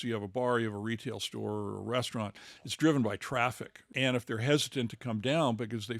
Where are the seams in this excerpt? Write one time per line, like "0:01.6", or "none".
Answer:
0:03.9